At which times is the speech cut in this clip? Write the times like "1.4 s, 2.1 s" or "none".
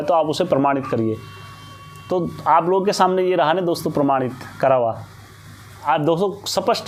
none